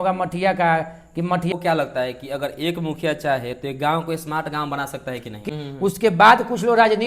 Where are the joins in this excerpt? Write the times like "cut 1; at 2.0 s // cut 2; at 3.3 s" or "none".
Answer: cut 1; at 1.5 s // cut 2; at 5.3 s